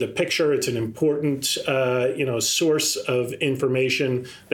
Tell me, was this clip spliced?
no; 0 cuts

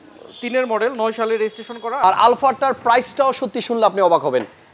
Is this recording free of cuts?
no; 1 cut; at 2.0 s

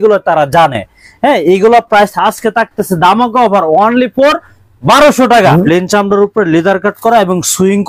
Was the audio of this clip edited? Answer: yes; 1 cut; at 5.5 s

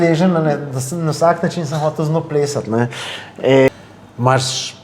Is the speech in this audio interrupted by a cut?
yes; 1 cut; at 3.7 s

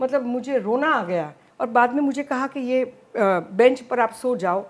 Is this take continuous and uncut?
no; 1 cut; at 1.4 s

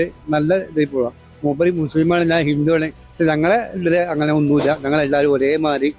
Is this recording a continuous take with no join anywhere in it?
yes; 0 cuts

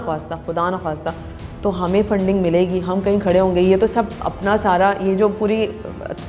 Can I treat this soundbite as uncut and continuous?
yes; 0 cuts

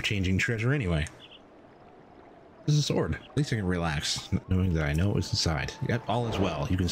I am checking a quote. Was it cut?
yes; 2 cuts; at 3.2 s, 4.4 s

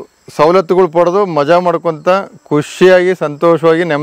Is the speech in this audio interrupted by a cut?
no; 0 cuts

